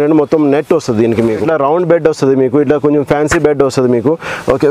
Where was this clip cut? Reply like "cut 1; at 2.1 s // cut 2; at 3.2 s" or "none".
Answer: cut 1; at 1.4 s